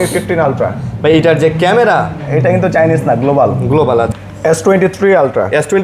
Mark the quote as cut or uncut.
cut